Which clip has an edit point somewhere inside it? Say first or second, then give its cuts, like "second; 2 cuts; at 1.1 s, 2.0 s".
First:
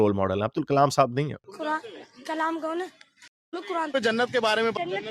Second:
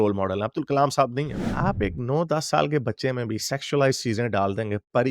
second; 1 cut; at 1.4 s